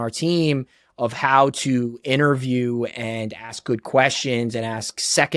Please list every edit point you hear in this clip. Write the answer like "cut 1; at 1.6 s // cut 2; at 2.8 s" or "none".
none